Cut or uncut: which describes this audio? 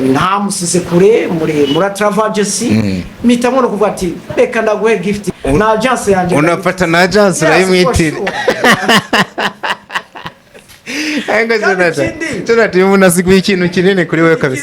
cut